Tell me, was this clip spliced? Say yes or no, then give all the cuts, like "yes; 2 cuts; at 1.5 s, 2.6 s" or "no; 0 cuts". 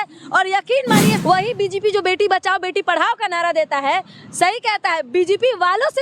yes; 1 cut; at 1.2 s